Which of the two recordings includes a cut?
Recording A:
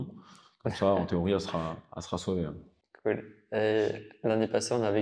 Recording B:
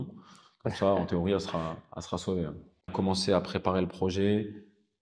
B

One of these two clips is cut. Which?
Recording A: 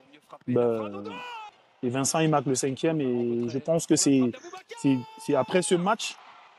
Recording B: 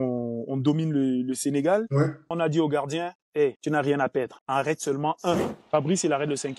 B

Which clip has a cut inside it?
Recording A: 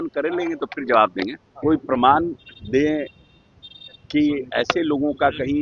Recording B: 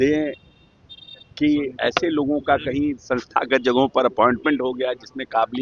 A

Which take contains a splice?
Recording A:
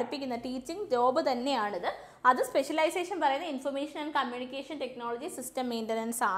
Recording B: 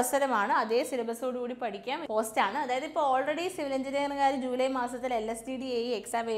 B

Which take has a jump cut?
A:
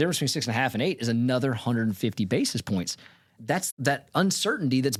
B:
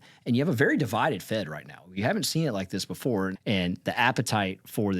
B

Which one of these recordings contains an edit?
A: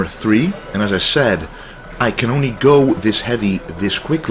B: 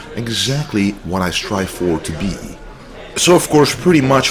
B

